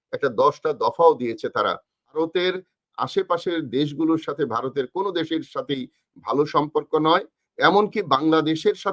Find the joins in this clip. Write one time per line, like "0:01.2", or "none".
0:02.2

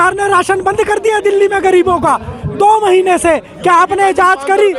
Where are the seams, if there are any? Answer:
none

